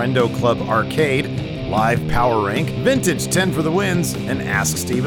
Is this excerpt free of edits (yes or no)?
yes